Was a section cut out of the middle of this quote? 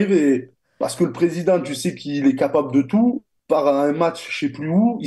no; 0 cuts

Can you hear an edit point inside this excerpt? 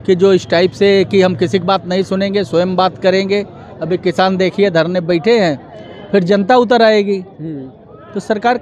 no; 0 cuts

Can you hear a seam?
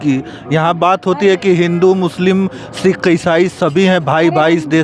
no; 0 cuts

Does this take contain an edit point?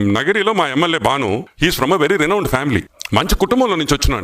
yes; 2 cuts; at 1.5 s, 3.0 s

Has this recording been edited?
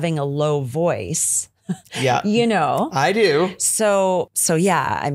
no; 0 cuts

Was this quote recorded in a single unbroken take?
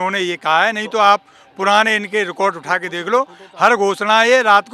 yes; 0 cuts

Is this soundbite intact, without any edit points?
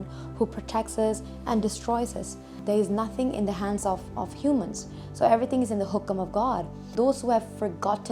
no; 2 cuts; at 2.5 s, 6.9 s

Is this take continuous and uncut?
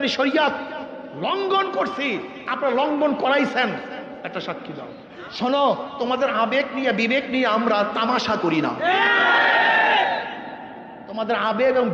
no; 1 cut; at 5.1 s

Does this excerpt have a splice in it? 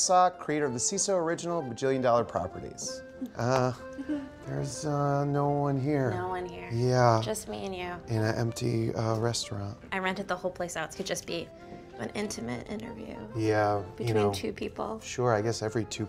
yes; 1 cut; at 1.4 s

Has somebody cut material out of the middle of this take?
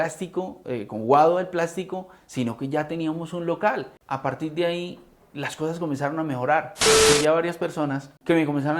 yes; 2 cuts; at 4.0 s, 6.9 s

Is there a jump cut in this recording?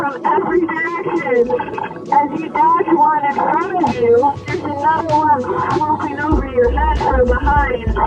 yes; 1 cut; at 4.6 s

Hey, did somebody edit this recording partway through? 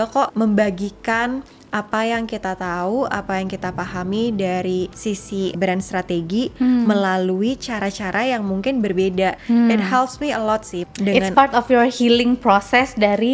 yes; 3 cuts; at 5.5 s, 9.4 s, 10.8 s

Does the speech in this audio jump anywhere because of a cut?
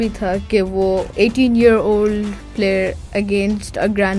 yes; 2 cuts; at 1.1 s, 2.4 s

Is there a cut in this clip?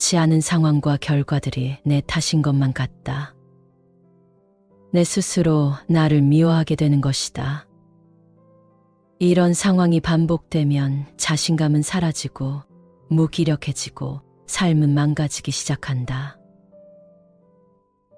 yes; 4 cuts; at 3.3 s, 4.9 s, 7.6 s, 9.2 s

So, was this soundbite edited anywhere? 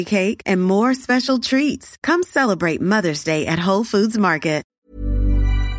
yes; 1 cut; at 4.7 s

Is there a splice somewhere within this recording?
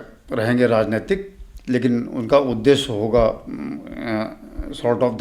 no; 0 cuts

